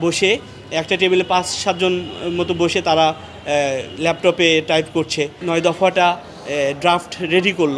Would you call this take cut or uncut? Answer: cut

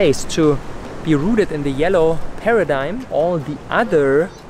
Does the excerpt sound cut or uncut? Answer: cut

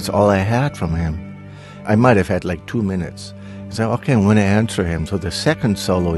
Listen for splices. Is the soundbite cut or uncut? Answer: cut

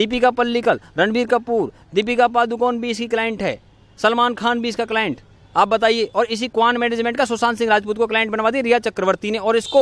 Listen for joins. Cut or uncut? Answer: uncut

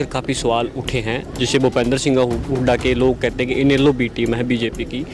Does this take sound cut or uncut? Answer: uncut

